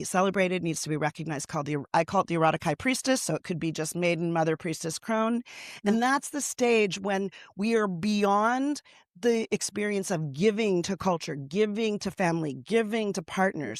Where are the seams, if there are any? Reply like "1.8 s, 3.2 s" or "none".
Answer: none